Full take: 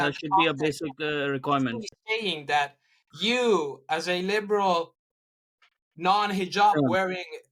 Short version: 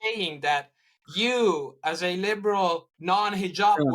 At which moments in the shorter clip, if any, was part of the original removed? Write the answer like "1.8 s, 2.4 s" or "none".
2.9 s